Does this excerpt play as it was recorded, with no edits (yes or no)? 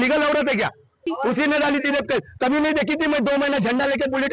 no